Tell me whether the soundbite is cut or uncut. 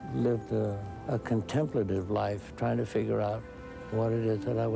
cut